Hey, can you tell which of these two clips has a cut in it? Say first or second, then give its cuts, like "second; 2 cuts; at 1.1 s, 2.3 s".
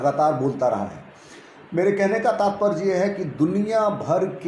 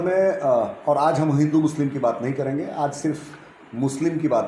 second; 1 cut; at 1.0 s